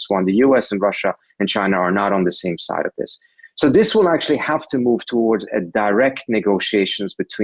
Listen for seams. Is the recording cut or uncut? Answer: uncut